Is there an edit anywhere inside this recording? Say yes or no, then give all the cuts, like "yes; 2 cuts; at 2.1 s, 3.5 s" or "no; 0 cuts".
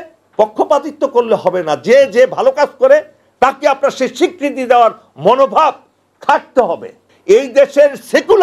yes; 1 cut; at 7.1 s